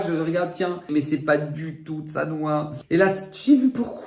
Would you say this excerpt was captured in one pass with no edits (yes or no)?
no